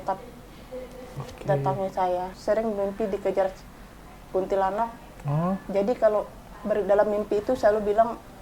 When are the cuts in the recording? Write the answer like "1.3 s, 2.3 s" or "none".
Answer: 2.3 s